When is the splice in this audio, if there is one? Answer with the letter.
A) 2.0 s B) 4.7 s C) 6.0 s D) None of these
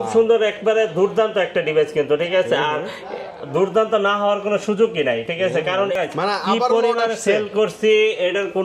C